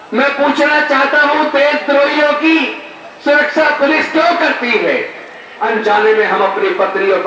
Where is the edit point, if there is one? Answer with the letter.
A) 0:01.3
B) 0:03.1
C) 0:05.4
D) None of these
C